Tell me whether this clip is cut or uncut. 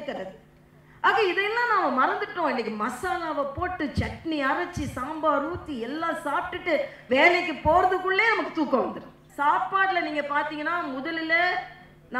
cut